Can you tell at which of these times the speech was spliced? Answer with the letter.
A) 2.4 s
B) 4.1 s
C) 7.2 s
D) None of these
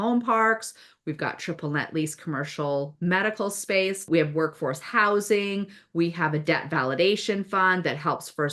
B